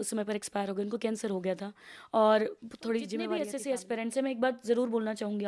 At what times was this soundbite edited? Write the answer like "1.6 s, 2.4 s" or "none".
3.4 s